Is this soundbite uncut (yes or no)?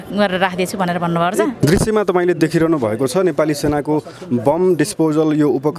no